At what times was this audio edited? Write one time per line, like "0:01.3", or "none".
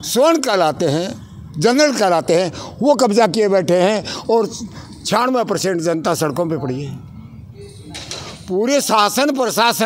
none

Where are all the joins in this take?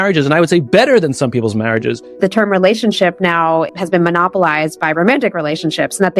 0:02.2
0:03.8

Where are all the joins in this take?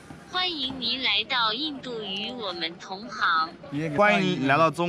0:03.9

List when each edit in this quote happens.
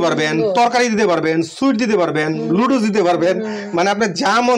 none

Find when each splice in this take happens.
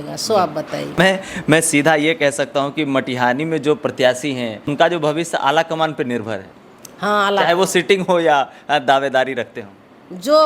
0:01.0
0:04.7

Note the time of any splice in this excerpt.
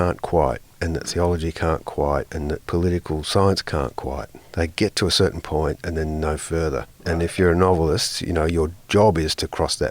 0:02.6
0:07.0

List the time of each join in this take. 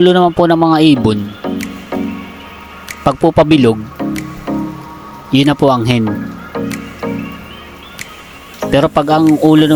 none

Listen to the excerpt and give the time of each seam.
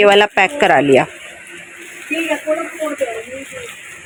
none

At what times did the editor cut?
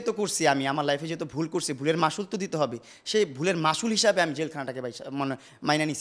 none

